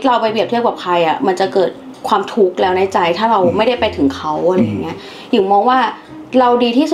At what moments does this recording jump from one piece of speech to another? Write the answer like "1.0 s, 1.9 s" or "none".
1.9 s